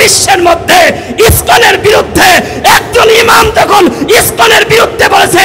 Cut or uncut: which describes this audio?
uncut